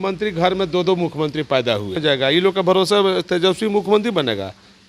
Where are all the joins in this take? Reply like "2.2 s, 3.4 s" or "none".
2.0 s